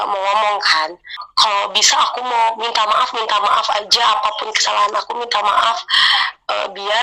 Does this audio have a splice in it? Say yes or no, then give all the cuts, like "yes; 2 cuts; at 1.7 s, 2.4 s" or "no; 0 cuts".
yes; 1 cut; at 1.2 s